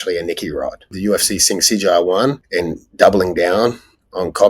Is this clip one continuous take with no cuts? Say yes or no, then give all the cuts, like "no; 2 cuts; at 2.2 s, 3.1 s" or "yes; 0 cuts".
no; 2 cuts; at 0.9 s, 2.4 s